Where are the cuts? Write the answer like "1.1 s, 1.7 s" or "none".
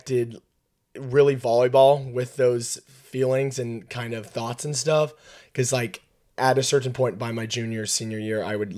none